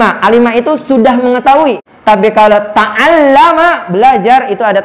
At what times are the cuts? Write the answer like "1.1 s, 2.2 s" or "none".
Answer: 1.9 s